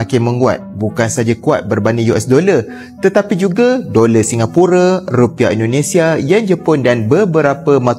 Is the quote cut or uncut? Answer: uncut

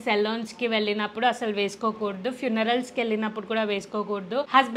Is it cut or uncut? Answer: uncut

